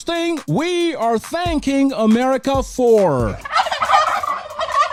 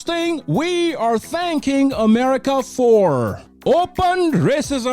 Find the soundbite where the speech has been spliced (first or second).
second